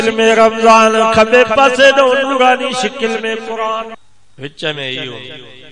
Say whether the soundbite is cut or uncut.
cut